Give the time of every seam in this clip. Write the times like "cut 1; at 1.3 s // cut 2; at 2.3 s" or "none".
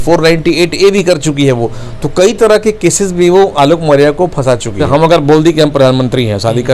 cut 1; at 4.8 s